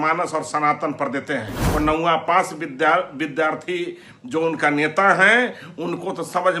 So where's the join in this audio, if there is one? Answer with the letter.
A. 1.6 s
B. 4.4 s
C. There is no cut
A